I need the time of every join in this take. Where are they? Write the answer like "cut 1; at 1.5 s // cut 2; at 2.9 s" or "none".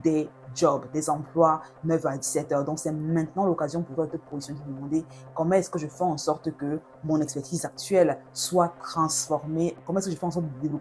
cut 1; at 9.8 s